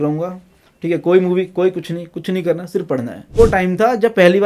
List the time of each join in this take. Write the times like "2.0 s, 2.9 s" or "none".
3.4 s